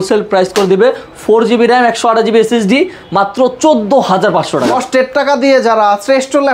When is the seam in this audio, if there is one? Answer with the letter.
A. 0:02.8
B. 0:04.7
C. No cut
B